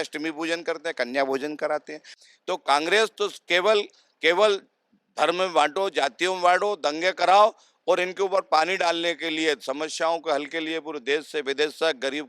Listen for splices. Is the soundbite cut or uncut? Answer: cut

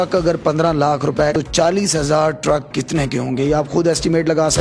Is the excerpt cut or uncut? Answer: cut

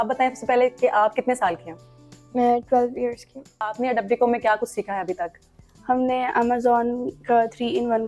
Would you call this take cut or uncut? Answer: cut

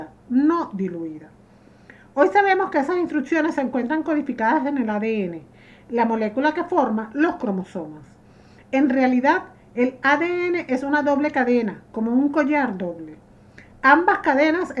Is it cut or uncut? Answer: cut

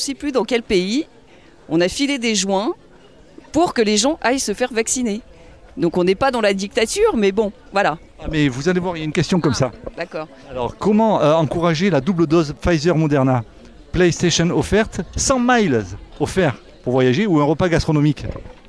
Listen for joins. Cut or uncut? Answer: uncut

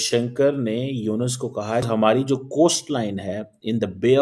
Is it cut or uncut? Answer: cut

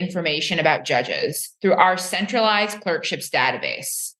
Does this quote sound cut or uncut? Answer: uncut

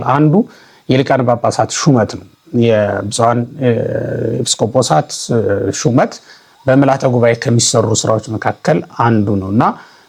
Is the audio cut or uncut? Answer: uncut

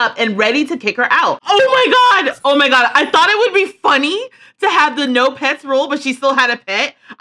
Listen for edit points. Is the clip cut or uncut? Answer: cut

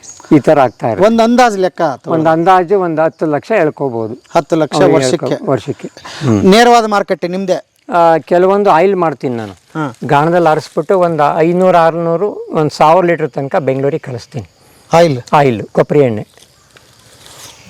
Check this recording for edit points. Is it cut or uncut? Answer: cut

